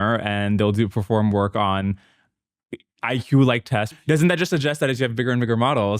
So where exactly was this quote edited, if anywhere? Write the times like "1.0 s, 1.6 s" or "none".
3.9 s